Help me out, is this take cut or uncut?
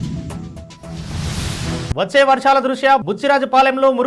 cut